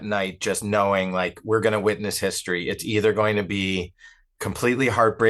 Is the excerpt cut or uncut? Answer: uncut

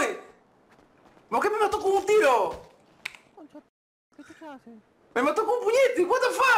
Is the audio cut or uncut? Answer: uncut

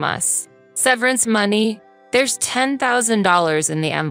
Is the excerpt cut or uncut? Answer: uncut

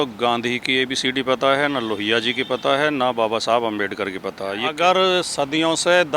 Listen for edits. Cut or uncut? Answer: cut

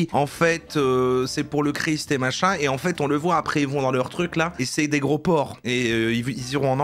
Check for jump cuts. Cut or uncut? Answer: cut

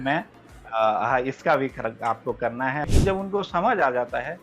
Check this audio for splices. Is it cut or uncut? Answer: cut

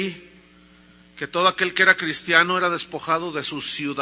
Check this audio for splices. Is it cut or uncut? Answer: cut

